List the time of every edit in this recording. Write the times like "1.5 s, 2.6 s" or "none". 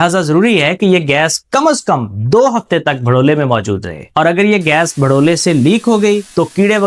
none

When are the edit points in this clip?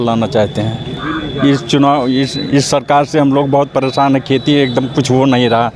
0.9 s

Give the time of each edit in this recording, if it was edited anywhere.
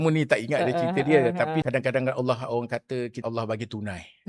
1.7 s, 3.2 s

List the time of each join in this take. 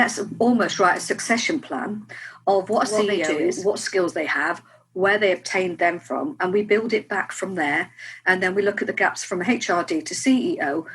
3.3 s

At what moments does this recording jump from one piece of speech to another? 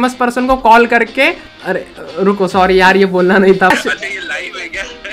1.9 s, 3.7 s

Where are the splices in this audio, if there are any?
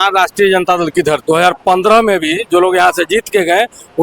1.2 s

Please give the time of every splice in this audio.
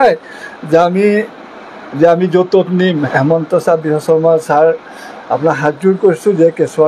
3.0 s

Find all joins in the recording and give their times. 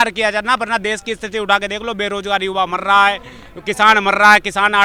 none

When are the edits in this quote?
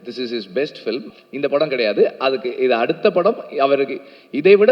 1.1 s

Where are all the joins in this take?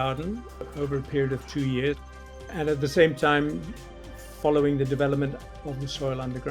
2.2 s, 5.5 s

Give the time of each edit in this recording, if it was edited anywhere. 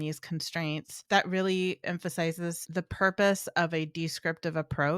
1.0 s, 2.6 s

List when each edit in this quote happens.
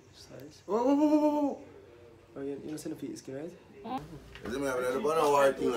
4.0 s

